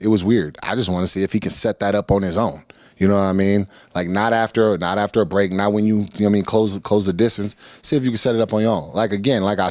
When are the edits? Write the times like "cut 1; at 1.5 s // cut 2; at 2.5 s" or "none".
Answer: none